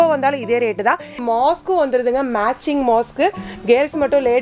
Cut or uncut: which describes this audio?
cut